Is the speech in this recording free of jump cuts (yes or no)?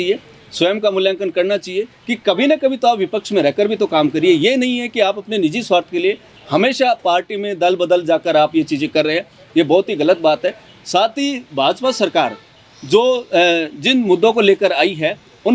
yes